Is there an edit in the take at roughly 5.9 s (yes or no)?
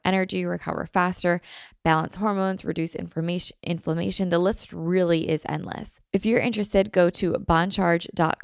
yes